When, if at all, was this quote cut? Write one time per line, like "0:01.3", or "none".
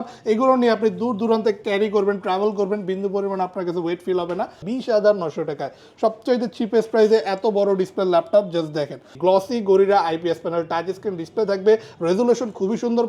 0:04.6
0:09.1

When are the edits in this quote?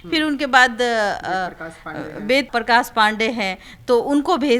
0:02.5

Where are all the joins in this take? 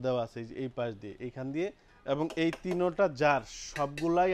0:01.9

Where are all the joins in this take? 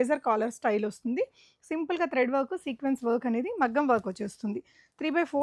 none

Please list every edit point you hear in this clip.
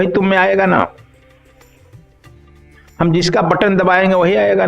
0:01.0
0:02.5

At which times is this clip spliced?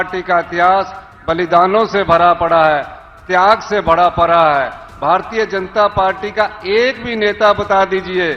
none

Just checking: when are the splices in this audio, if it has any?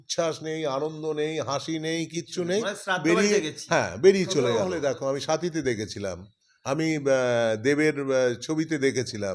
0:04.7

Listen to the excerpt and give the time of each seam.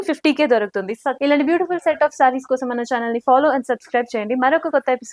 0:01.1

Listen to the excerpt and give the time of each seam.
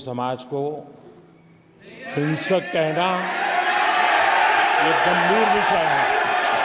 none

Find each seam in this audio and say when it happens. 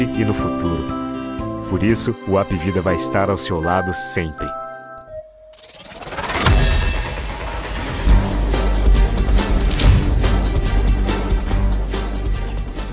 0:05.0

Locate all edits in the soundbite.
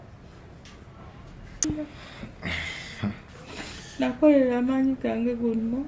0:01.6

